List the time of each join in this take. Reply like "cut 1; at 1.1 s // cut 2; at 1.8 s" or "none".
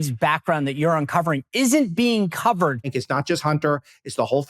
cut 1; at 3.0 s

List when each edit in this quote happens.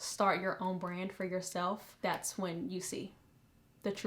cut 1; at 1.9 s

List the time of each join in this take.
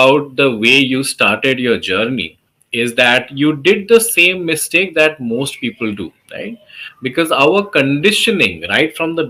none

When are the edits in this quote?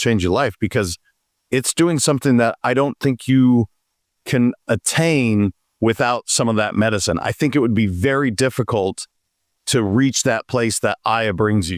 none

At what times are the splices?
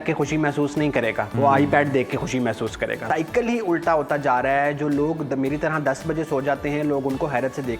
cut 1; at 1.3 s // cut 2; at 3.0 s

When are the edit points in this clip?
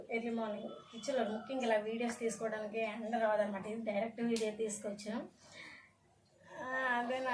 none

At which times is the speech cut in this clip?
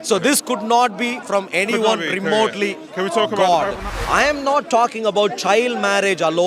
cut 1; at 3.9 s

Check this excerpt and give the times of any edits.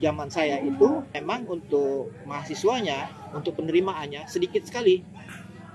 cut 1; at 1.2 s

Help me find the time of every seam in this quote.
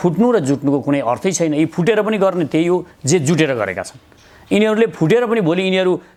none

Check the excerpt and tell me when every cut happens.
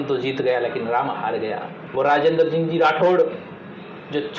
cut 1; at 1.7 s

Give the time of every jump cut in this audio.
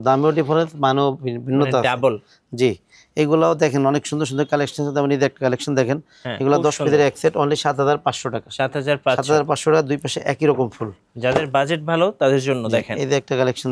none

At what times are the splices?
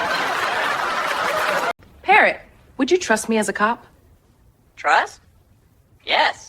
cut 1; at 1.9 s

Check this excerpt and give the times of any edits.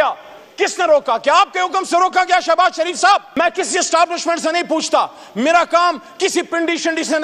cut 1; at 3.3 s

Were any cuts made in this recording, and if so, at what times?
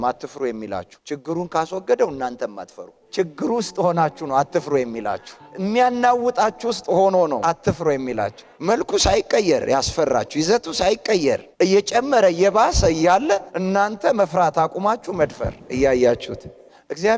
none

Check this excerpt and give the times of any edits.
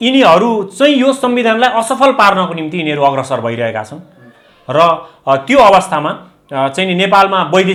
none

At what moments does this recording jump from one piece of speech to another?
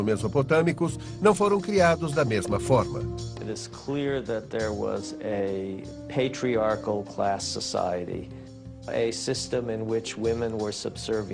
cut 1; at 8.1 s

